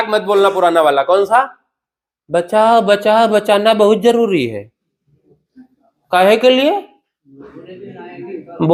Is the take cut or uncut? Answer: uncut